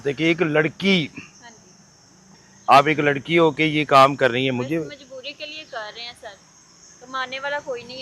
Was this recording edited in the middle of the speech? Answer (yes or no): yes